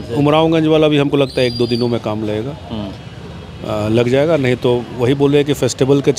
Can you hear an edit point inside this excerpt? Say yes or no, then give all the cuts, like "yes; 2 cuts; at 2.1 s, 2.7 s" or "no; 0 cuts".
no; 0 cuts